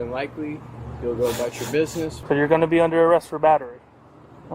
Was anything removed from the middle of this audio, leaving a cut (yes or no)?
yes